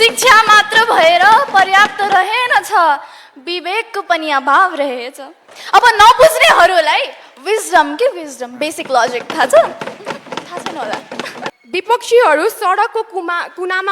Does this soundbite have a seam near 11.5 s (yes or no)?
yes